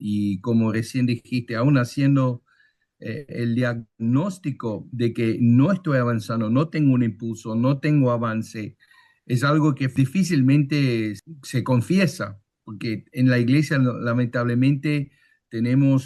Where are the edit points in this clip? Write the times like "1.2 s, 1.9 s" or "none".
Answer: 9.9 s, 11.2 s